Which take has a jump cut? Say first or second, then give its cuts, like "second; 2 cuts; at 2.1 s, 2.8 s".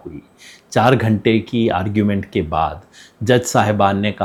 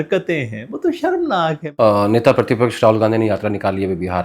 second; 1 cut; at 1.6 s